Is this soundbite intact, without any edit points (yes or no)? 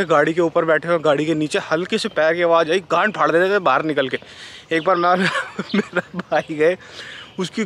yes